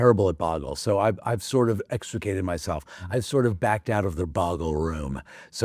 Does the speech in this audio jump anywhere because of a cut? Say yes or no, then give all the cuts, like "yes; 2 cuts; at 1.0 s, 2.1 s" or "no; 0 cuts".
no; 0 cuts